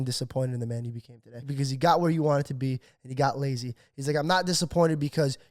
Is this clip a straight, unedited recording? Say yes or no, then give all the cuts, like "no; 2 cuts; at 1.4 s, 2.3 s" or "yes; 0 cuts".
no; 1 cut; at 1.5 s